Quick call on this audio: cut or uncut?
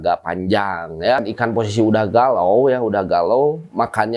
cut